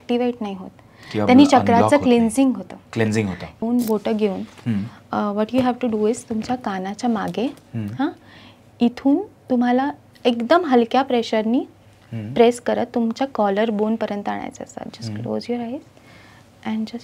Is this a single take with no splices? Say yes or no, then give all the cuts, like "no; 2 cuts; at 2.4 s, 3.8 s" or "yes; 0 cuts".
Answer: no; 1 cut; at 3.6 s